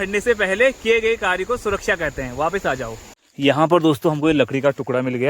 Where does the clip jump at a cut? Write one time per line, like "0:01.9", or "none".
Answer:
0:03.1